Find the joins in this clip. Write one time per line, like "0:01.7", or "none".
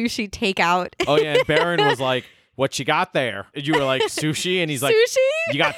0:03.5